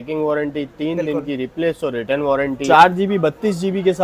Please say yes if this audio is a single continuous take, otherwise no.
no